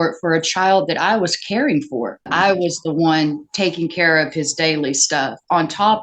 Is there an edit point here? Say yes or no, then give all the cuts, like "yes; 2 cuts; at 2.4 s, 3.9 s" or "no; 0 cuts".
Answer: yes; 1 cut; at 2.3 s